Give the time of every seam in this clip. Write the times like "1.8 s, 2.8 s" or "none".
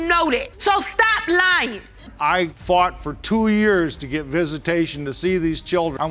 2.1 s